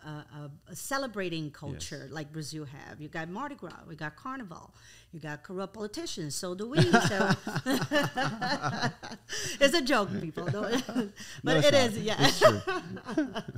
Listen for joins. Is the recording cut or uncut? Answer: uncut